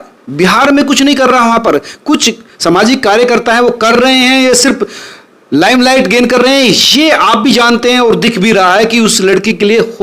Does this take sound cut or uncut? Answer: uncut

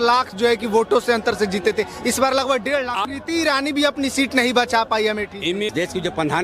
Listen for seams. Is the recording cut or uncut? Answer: cut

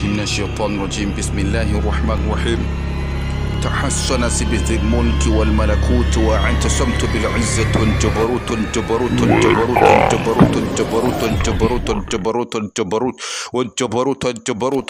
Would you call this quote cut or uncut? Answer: uncut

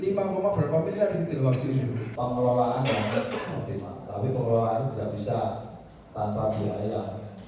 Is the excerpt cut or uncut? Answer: cut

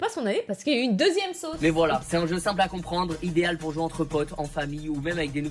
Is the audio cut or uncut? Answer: cut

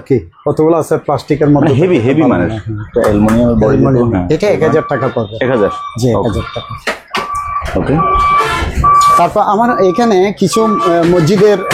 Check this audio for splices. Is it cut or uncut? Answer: uncut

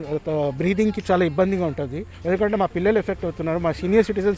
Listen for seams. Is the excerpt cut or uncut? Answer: cut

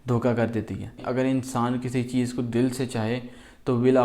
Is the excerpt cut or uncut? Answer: cut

